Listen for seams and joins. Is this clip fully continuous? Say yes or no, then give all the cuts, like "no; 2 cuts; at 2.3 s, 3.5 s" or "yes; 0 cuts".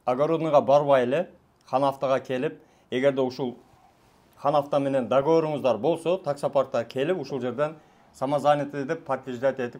yes; 0 cuts